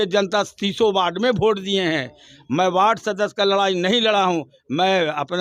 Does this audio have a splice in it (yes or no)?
no